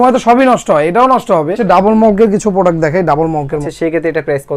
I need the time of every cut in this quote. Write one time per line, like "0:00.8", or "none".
0:01.6
0:03.7